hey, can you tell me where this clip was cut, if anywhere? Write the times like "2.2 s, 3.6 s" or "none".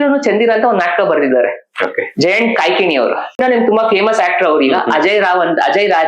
3.4 s